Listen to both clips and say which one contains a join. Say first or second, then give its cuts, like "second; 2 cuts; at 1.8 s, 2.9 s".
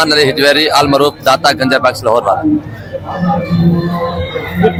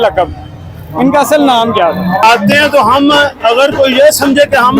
second; 1 cut; at 2.2 s